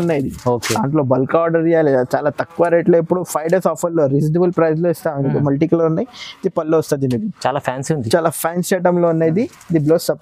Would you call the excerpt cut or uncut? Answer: uncut